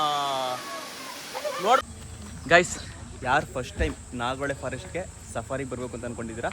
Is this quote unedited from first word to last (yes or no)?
no